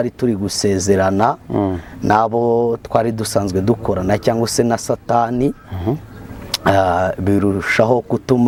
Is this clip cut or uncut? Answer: uncut